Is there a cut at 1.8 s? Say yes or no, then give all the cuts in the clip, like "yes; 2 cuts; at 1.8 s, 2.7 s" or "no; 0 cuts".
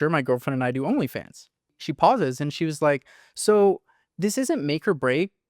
yes; 1 cut; at 1.8 s